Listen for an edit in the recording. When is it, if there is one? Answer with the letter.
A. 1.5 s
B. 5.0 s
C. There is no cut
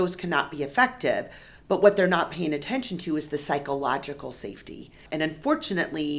B